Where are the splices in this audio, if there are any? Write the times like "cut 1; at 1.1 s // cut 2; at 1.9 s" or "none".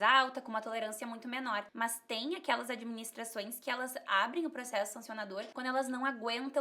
cut 1; at 1.7 s // cut 2; at 5.5 s

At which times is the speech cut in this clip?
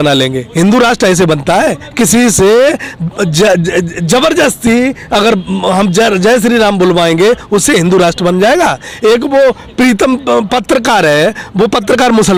none

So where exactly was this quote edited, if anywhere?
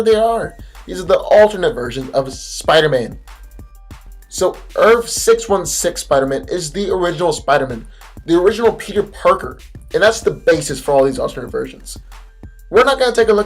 cut 1; at 11.7 s

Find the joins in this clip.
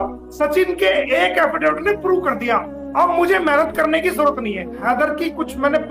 cut 1; at 4.7 s

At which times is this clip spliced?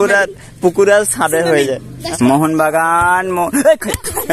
cut 1; at 1.9 s

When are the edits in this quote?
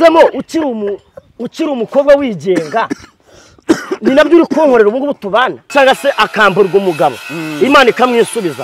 cut 1; at 5.7 s

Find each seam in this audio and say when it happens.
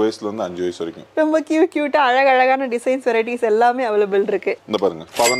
cut 1; at 1.0 s // cut 2; at 4.6 s

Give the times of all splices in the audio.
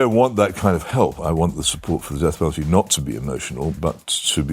cut 1; at 1.2 s // cut 2; at 3.8 s

